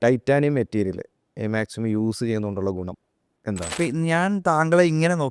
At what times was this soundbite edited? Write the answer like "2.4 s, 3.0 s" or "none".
3.7 s